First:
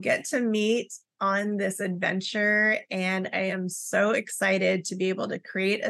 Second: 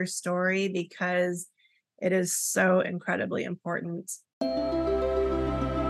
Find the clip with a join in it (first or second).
second